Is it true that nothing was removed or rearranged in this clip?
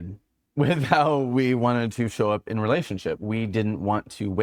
yes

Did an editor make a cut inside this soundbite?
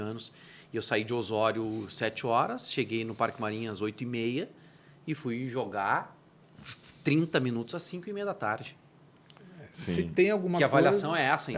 no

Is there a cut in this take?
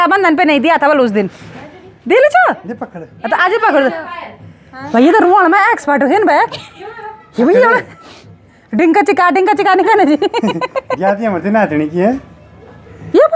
no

